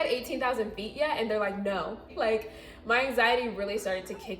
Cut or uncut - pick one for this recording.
cut